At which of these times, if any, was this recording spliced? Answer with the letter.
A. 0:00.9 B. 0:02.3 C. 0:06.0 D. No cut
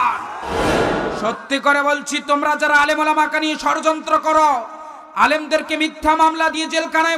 A